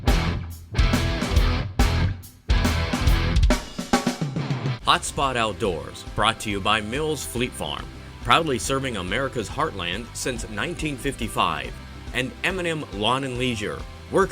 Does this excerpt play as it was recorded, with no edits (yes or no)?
no